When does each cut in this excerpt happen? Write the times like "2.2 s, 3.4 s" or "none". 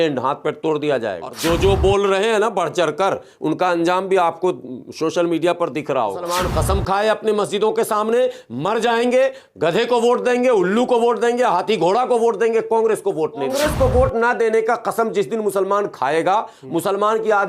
1.3 s, 6.3 s, 13.5 s